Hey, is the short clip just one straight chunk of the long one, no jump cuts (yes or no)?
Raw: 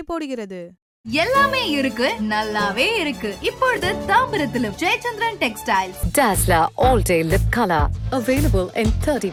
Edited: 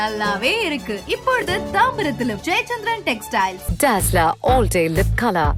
yes